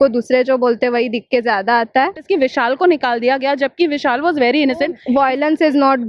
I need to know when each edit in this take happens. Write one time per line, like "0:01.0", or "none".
0:02.2
0:05.0

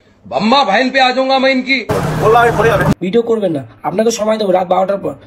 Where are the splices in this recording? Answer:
0:02.9

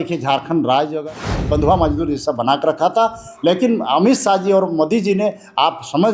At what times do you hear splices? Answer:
0:01.0

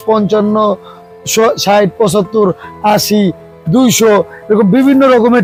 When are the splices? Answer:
none

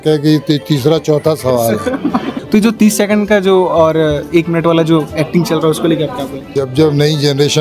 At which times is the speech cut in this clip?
0:02.3
0:06.5

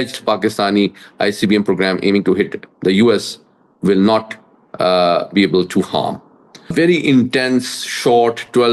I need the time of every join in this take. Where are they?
0:06.7

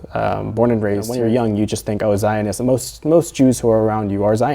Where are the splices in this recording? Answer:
0:01.1

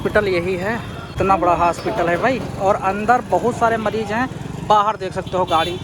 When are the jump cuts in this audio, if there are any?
0:01.1

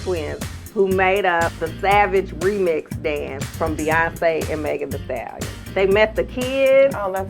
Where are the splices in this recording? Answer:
0:01.6
0:05.6

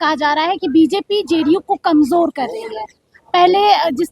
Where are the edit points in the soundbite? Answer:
none

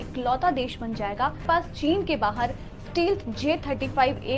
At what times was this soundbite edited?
none

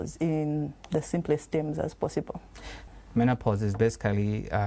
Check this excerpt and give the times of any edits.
0:02.9

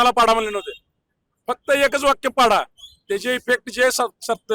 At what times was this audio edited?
none

